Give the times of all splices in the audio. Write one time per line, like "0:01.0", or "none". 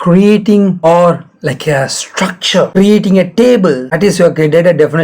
0:00.8
0:02.7
0:03.9